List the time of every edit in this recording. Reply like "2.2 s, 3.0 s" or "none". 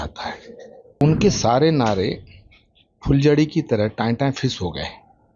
1.0 s